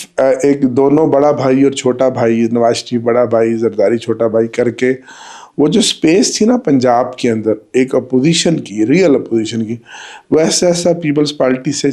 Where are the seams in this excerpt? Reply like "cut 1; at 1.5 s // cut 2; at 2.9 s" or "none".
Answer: none